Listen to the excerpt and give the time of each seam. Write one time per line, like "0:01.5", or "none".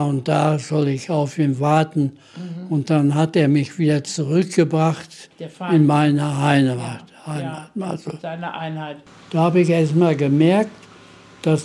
0:09.0